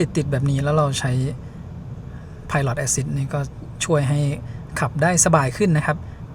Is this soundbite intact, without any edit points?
yes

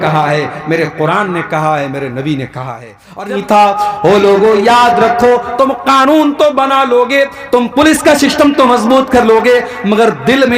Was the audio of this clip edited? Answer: yes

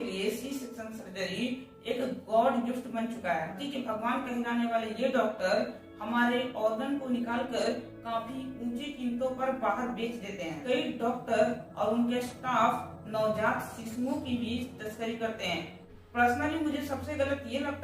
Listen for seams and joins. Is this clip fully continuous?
no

